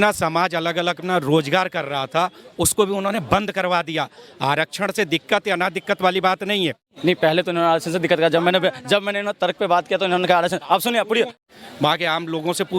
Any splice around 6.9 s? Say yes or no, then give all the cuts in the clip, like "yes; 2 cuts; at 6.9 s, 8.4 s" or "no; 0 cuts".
yes; 2 cuts; at 6.9 s, 11.3 s